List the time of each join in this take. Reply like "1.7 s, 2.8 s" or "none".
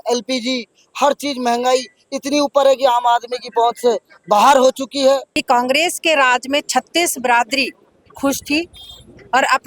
5.3 s